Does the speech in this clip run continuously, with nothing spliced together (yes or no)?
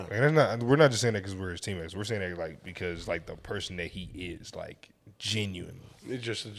yes